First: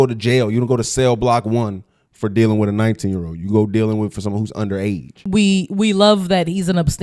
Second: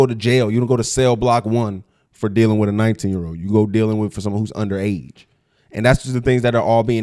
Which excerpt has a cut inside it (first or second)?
first